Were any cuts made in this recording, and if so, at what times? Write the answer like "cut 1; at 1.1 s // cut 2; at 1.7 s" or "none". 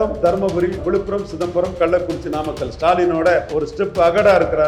cut 1; at 0.8 s // cut 2; at 3.5 s